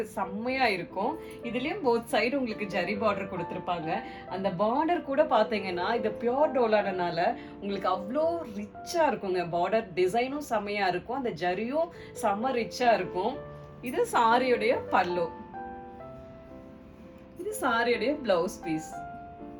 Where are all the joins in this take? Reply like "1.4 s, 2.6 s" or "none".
none